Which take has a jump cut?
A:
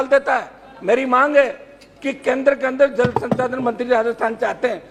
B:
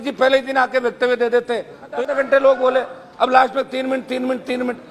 B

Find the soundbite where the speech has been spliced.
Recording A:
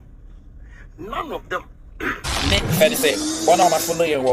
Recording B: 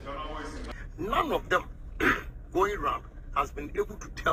A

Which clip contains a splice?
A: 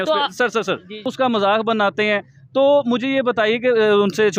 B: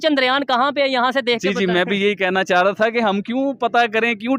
A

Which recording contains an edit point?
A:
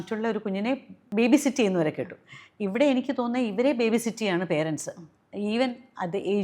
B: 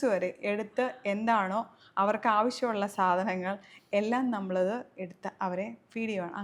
A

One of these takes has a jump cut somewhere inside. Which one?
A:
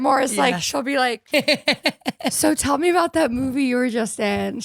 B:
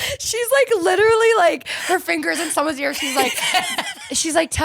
A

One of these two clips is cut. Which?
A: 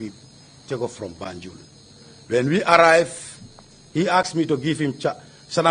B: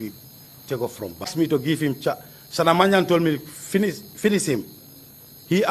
A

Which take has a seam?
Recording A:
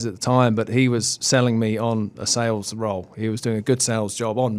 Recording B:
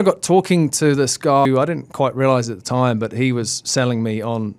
B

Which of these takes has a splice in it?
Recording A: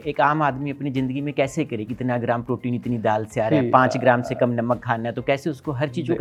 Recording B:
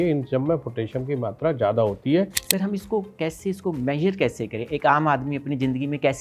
B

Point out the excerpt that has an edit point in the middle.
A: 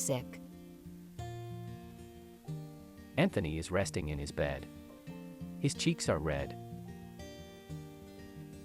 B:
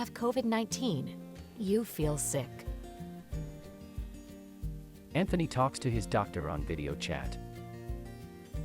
B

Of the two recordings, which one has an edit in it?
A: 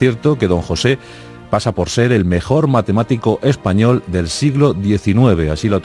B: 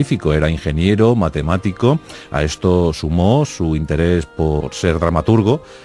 B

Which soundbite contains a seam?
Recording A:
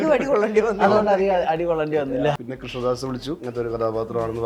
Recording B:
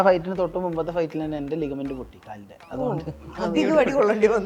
A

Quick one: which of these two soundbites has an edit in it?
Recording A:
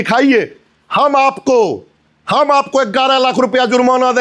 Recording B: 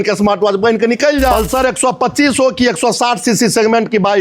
B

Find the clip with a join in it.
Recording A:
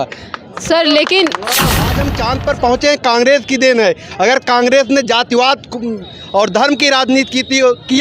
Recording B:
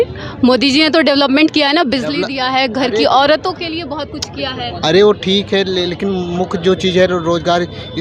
A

